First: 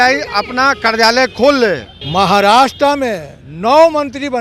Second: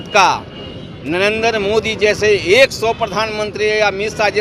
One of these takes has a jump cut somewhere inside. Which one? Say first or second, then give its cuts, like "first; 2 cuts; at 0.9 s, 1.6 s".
first; 1 cut; at 1.9 s